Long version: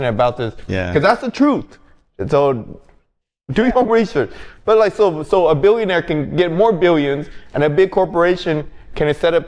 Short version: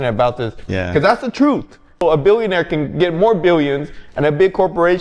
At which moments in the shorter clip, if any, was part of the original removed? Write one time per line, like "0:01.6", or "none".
0:02.0